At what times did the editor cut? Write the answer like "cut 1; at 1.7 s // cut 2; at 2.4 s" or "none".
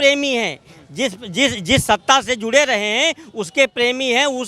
none